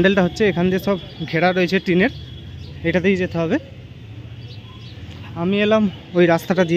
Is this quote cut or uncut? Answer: uncut